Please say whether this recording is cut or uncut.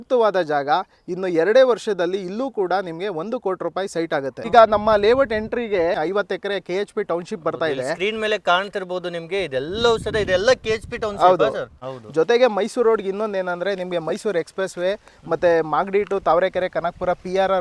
cut